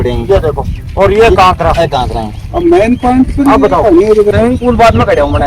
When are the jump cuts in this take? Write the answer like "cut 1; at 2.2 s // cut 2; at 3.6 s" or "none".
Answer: cut 1; at 4.3 s

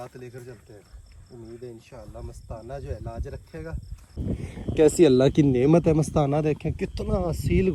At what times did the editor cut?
cut 1; at 4.2 s

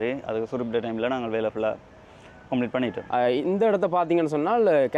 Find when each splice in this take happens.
none

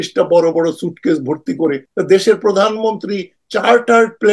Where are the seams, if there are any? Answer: cut 1; at 1.8 s

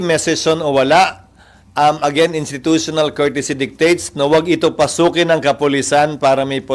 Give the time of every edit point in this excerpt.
none

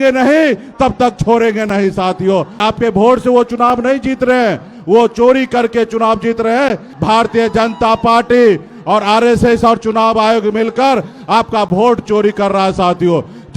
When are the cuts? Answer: cut 1; at 2.6 s // cut 2; at 6.9 s

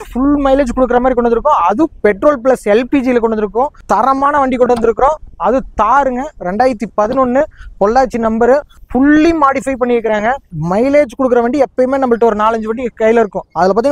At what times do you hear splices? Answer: cut 1; at 3.7 s // cut 2; at 8.7 s // cut 3; at 10.5 s

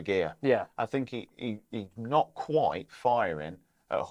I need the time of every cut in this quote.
none

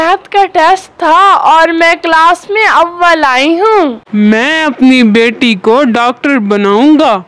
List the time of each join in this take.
cut 1; at 4.0 s

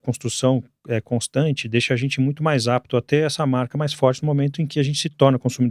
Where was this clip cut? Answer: none

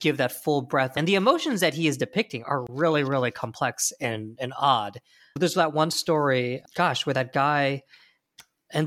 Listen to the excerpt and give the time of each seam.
cut 1; at 0.9 s // cut 2; at 5.3 s

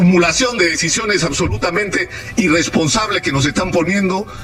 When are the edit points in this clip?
none

